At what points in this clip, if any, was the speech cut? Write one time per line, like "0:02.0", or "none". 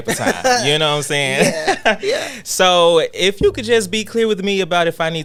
none